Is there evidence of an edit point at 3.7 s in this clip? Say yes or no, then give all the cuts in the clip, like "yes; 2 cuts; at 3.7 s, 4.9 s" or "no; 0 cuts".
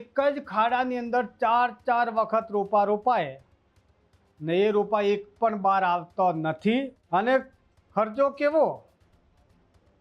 no; 1 cut; at 7.0 s